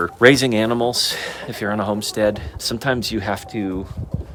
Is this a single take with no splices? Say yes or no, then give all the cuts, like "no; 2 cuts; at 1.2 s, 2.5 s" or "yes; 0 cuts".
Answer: yes; 0 cuts